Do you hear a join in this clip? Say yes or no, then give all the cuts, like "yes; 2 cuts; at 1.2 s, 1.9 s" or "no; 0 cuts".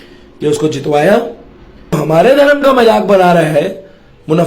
yes; 1 cut; at 2.0 s